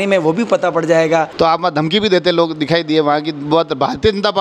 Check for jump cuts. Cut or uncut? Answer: cut